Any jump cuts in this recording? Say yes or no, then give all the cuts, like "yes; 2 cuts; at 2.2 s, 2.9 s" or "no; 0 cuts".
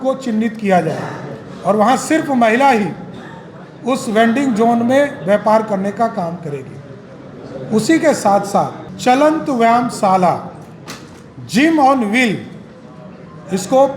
no; 0 cuts